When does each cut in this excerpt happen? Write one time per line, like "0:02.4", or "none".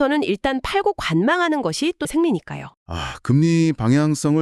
0:02.1